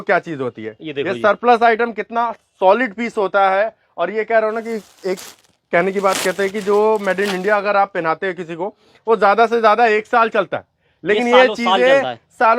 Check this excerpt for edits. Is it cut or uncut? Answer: uncut